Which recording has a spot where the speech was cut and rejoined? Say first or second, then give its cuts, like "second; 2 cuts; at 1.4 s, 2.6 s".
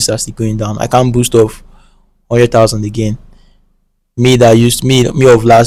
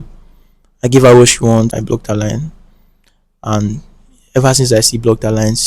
second; 1 cut; at 1.7 s